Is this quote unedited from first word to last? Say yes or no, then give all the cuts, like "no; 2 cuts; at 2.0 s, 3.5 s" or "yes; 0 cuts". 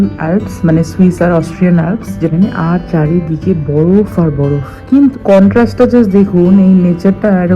no; 2 cuts; at 2.3 s, 5.1 s